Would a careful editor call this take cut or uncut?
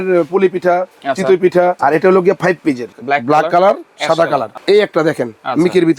cut